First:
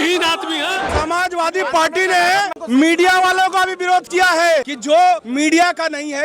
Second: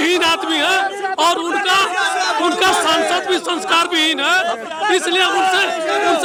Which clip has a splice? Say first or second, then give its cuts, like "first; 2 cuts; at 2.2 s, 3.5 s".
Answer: first; 3 cuts; at 0.9 s, 2.6 s, 4.7 s